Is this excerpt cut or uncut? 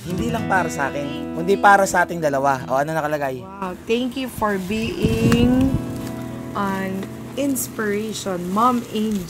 uncut